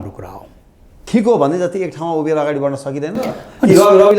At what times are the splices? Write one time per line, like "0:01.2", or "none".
0:01.0

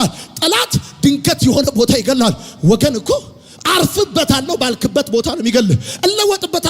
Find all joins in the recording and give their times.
none

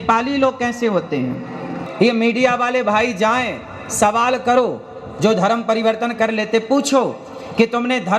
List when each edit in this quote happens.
0:01.8

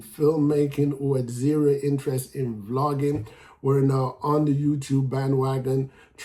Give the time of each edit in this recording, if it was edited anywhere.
none

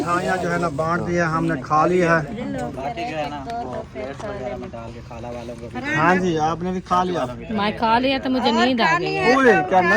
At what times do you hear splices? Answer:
0:02.4

